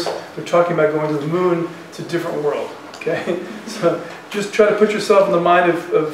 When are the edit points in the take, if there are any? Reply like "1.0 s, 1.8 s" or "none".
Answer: none